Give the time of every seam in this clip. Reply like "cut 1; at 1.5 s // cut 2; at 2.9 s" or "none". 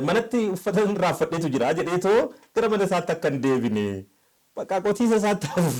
none